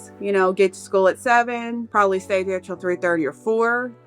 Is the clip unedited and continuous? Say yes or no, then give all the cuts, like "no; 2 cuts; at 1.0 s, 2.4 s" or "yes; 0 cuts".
no; 1 cut; at 1.8 s